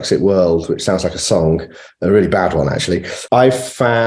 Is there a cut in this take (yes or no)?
yes